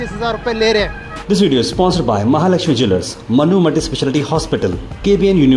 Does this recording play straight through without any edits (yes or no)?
no